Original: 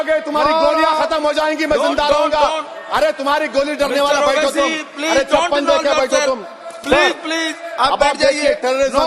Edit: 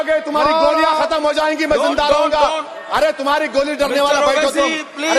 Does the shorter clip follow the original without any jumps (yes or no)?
yes